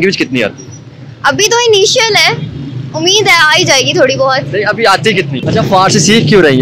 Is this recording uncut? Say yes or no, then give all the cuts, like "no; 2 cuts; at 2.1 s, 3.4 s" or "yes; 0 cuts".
no; 1 cut; at 5.3 s